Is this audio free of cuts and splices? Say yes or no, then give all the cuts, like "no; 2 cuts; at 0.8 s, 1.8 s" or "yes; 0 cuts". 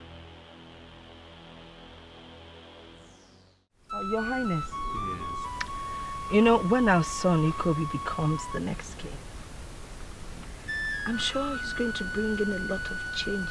no; 1 cut; at 3.6 s